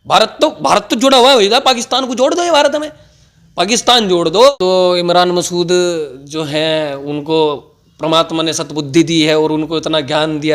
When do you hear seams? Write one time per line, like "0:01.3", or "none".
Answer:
0:04.5